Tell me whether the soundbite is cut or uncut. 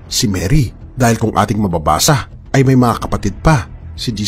uncut